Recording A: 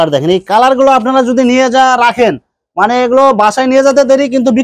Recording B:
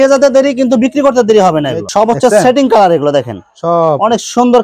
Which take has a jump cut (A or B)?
B